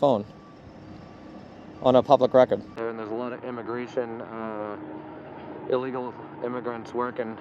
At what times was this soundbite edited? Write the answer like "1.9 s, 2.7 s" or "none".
2.8 s

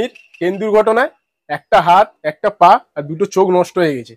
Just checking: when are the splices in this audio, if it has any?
none

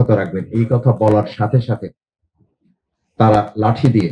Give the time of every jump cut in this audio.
none

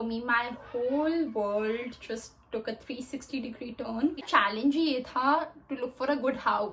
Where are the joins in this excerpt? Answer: 4.3 s

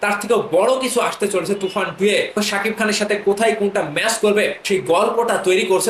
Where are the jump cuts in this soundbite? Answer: 2.3 s, 4.6 s

